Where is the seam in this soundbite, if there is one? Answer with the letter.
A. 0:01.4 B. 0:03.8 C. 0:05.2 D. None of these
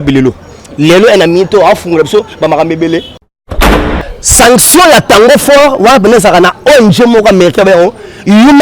B